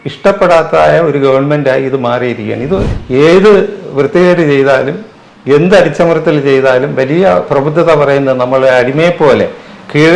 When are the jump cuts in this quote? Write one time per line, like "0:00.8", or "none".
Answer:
0:02.9

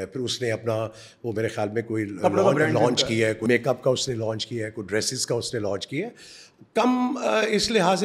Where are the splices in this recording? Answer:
none

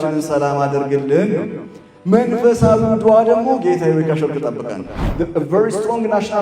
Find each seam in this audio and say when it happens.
0:05.0

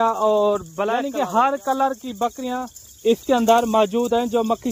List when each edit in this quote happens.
0:01.0

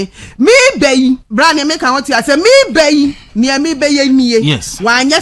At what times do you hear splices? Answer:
0:01.3

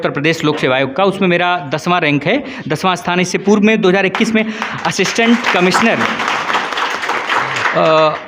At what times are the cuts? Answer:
none

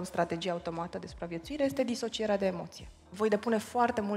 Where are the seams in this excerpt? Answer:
0:03.0

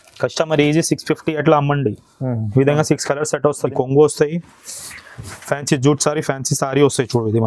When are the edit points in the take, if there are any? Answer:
0:03.7

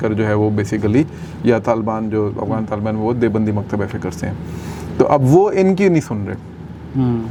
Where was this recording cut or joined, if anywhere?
none

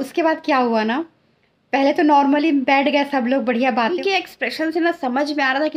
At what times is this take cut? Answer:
0:04.0

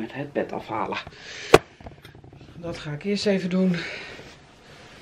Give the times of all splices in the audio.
none

